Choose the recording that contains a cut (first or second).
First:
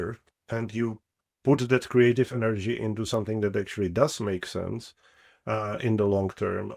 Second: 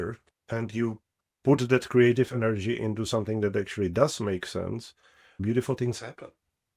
second